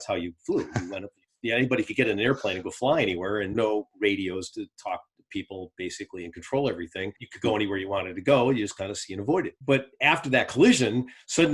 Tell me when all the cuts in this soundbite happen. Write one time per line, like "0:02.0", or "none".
0:03.5
0:07.1
0:09.5